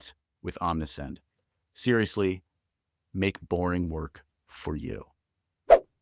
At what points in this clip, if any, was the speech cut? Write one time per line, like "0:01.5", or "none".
0:05.1